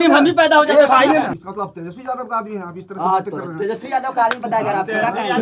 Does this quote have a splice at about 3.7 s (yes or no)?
no